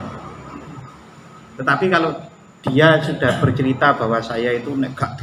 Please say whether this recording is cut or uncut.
uncut